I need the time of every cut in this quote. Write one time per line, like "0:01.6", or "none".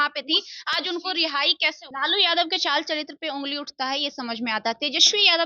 0:01.8

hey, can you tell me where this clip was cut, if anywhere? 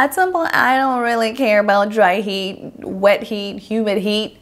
none

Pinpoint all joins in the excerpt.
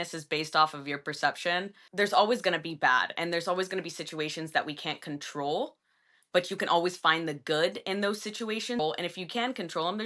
0:01.8
0:08.8

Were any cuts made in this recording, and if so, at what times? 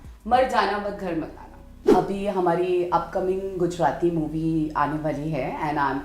0:01.9

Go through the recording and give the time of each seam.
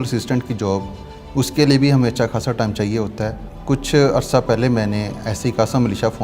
0:03.5

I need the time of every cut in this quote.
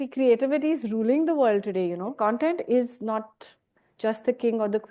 0:02.2

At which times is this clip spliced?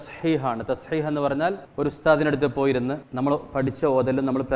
0:01.6
0:03.0

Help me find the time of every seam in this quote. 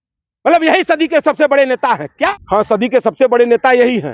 0:02.3

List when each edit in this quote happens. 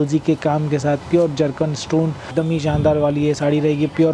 0:02.3

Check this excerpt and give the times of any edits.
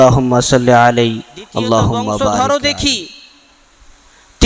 0:02.4

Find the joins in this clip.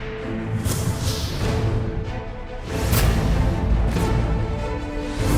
none

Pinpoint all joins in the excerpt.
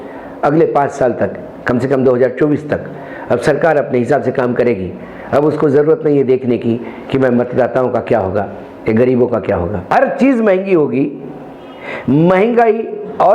0:09.9

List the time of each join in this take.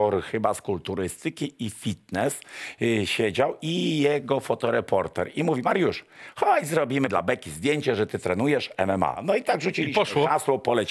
0:07.1
0:09.2

